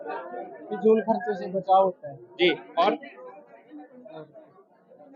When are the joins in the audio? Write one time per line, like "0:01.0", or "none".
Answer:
none

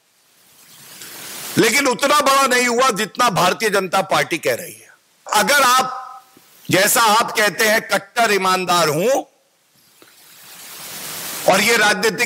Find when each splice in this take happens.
0:05.3

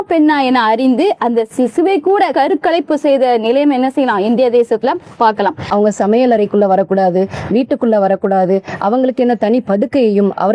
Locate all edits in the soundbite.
0:02.3
0:05.7

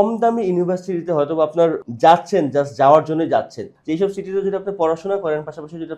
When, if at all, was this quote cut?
0:01.8
0:03.7

